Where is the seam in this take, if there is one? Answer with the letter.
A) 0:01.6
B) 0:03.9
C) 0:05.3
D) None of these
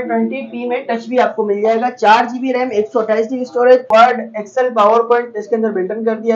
B